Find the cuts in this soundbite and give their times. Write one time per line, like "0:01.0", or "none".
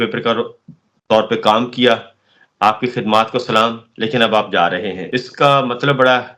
0:05.0